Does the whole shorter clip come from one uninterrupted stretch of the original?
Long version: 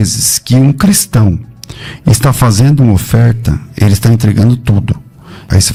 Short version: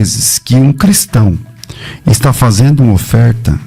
yes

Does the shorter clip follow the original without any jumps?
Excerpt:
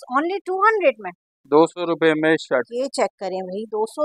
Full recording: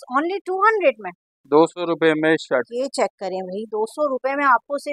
yes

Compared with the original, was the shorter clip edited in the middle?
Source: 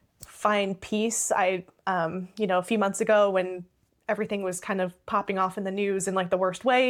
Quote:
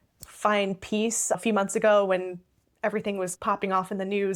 yes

